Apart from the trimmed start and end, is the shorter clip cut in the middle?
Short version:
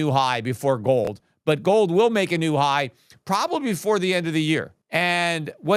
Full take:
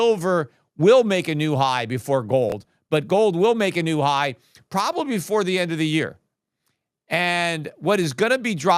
yes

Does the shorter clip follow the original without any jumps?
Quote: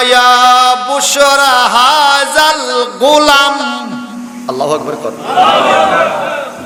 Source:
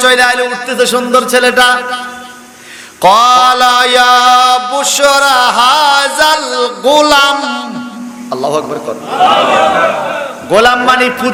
yes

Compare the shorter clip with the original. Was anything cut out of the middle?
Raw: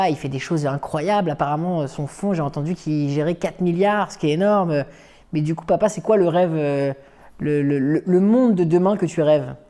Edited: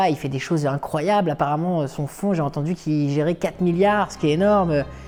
no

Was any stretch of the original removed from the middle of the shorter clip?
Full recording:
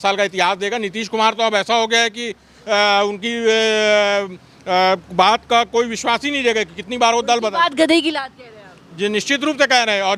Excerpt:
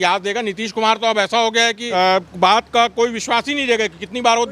yes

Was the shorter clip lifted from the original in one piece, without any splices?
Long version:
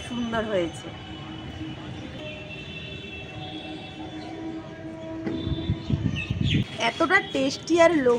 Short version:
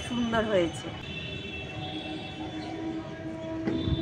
no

